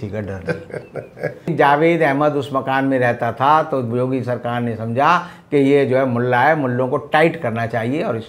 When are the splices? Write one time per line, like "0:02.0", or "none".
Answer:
0:01.5

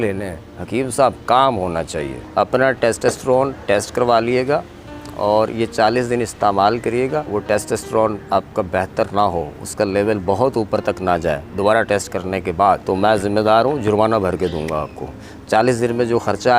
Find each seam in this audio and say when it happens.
0:02.2
0:07.3
0:12.8

